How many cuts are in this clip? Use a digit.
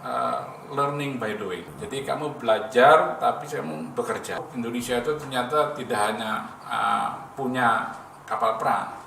2